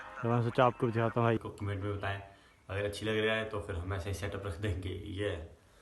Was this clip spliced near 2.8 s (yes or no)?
no